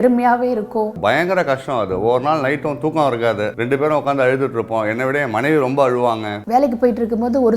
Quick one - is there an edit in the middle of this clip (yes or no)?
no